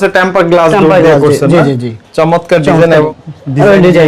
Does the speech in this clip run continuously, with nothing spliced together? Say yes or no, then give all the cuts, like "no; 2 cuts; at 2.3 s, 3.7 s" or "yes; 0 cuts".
yes; 0 cuts